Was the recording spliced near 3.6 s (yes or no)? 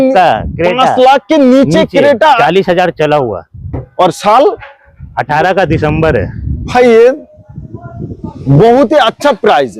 no